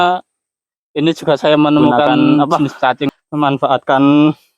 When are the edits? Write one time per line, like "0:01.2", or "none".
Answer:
0:03.1